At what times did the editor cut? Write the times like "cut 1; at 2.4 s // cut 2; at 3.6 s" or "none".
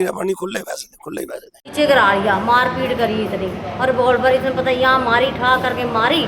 cut 1; at 1.5 s